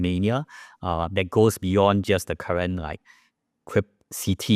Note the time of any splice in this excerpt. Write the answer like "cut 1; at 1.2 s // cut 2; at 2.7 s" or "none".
none

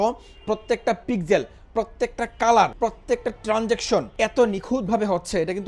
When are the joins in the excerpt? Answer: cut 1; at 2.7 s // cut 2; at 4.1 s

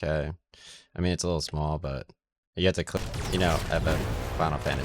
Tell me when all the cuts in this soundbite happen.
cut 1; at 3.0 s

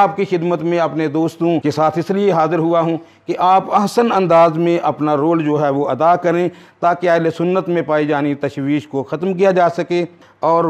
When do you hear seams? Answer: cut 1; at 1.6 s

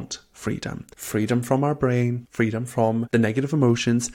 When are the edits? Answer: cut 1; at 0.9 s // cut 2; at 2.2 s // cut 3; at 3.1 s

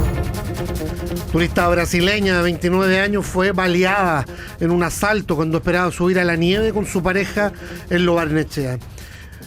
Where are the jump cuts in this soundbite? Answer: cut 1; at 1.3 s

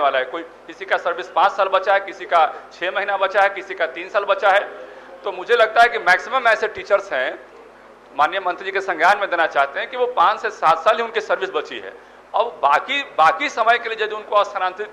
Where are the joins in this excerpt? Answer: none

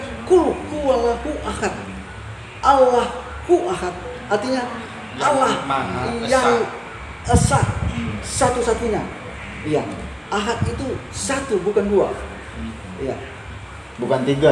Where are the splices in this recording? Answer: none

